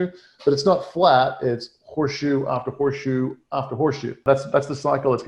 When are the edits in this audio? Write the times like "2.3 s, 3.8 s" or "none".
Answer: 4.2 s